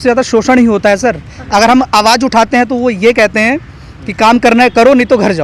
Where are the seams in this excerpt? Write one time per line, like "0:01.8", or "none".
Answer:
none